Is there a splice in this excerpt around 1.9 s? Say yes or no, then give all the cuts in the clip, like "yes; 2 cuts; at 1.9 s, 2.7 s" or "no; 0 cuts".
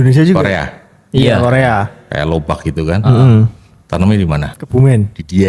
no; 1 cut; at 4.5 s